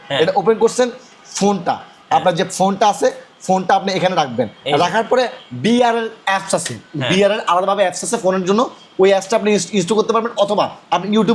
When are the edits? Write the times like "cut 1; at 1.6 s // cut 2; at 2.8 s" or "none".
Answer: none